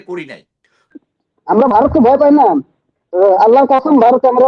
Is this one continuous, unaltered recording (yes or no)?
no